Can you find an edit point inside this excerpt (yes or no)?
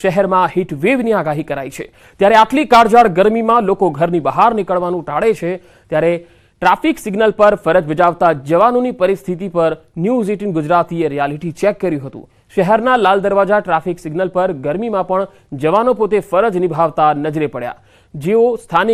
no